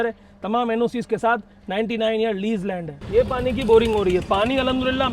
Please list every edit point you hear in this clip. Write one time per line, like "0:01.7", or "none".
0:02.9